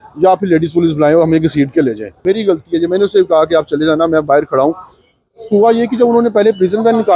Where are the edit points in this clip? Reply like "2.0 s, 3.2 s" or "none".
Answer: 2.2 s